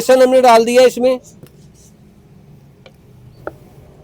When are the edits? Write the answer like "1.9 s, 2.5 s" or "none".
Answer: none